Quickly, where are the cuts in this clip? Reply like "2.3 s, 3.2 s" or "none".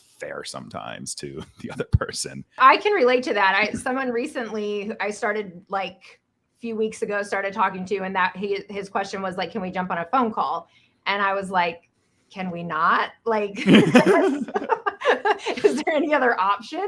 2.6 s